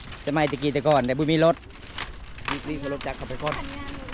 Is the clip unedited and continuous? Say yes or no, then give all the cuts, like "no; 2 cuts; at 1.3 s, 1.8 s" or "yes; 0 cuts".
yes; 0 cuts